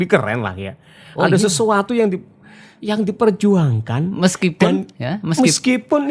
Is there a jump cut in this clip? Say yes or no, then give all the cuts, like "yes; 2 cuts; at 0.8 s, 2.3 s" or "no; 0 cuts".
no; 0 cuts